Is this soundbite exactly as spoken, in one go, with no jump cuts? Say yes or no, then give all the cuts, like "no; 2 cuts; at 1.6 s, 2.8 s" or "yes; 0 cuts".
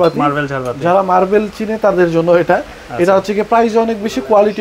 yes; 0 cuts